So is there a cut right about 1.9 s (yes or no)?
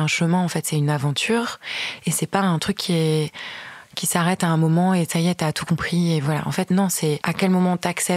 no